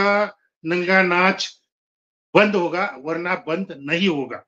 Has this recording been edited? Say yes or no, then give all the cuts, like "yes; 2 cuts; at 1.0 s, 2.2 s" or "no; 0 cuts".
no; 0 cuts